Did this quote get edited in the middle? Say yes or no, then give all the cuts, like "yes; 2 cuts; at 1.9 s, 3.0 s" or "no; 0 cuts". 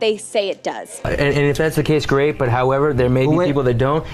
yes; 1 cut; at 1.1 s